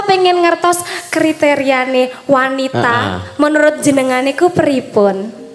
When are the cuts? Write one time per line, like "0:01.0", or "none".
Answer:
none

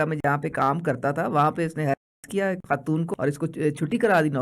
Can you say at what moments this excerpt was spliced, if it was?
0:03.1

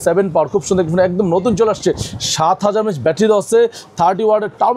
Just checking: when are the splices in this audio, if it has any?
none

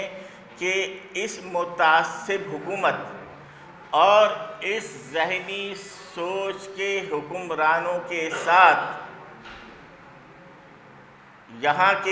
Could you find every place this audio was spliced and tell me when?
none

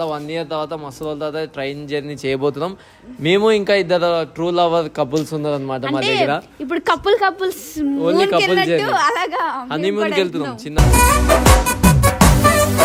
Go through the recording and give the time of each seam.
none

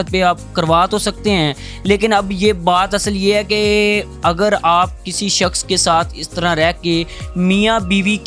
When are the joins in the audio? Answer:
none

